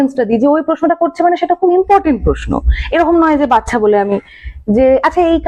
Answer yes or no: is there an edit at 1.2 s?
no